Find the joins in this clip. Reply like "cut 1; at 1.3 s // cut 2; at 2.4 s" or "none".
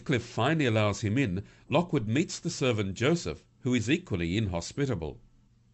none